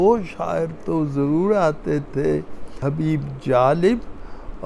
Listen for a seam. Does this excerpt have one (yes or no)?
yes